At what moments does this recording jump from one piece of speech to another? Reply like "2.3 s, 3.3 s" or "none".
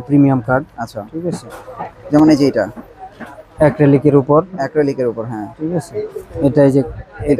none